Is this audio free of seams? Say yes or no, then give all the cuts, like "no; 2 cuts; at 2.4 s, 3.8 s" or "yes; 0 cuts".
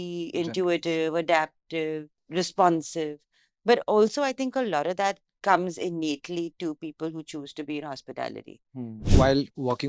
no; 2 cuts; at 2.1 s, 9.0 s